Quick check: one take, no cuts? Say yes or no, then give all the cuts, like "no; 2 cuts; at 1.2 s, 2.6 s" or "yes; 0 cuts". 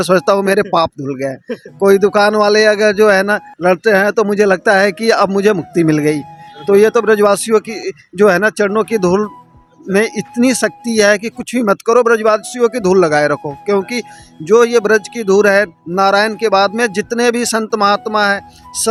yes; 0 cuts